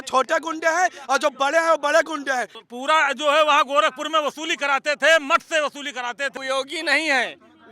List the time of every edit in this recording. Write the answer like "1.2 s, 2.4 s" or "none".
2.5 s, 6.3 s

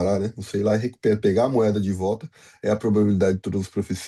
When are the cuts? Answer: none

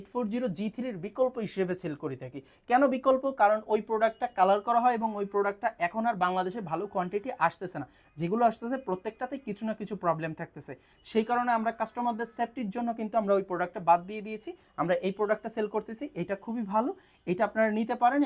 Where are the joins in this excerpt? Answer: none

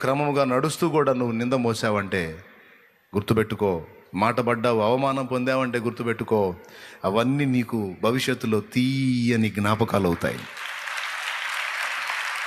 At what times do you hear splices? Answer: none

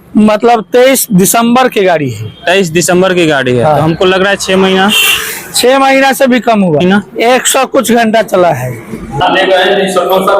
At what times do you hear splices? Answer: 6.8 s, 9.2 s

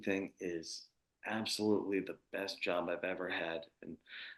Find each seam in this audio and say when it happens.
none

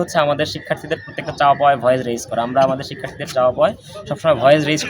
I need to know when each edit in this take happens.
none

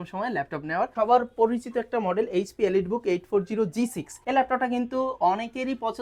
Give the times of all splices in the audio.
0.9 s, 4.1 s

